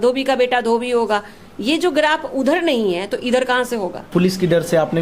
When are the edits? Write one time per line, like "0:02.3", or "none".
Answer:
0:04.0